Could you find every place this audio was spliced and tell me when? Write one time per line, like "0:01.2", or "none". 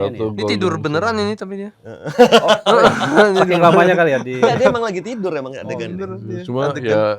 none